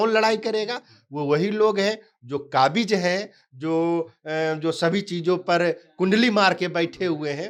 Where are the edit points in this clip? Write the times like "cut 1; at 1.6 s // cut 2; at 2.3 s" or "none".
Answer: none